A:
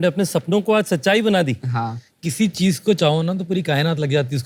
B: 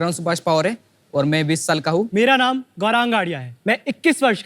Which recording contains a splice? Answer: B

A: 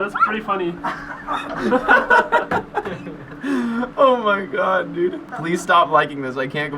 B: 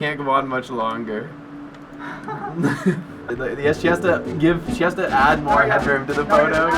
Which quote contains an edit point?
A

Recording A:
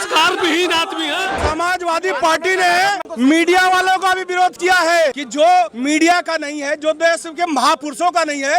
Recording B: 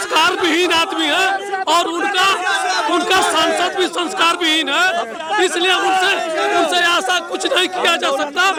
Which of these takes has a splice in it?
A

